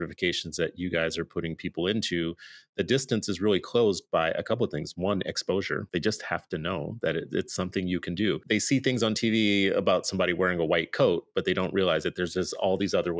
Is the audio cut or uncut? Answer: cut